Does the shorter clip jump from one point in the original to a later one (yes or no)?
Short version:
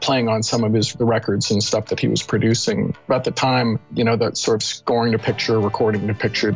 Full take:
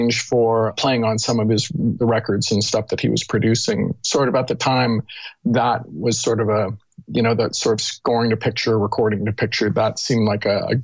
yes